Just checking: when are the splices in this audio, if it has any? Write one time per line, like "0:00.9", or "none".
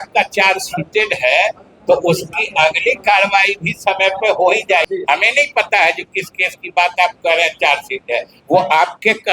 0:04.9